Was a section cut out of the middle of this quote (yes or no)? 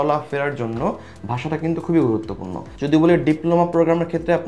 yes